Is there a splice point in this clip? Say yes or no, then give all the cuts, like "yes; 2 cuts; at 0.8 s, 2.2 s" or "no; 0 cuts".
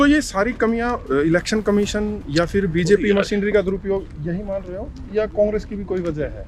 no; 0 cuts